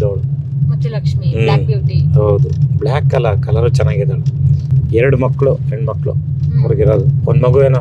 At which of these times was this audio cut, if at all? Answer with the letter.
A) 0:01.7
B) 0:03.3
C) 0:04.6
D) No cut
D